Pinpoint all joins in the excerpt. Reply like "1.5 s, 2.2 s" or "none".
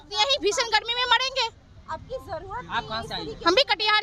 none